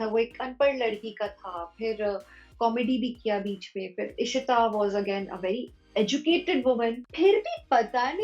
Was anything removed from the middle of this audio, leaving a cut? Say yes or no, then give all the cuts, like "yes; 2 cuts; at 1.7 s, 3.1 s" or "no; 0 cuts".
yes; 1 cut; at 7.0 s